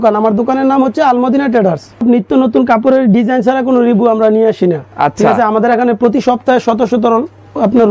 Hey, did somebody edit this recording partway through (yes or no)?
yes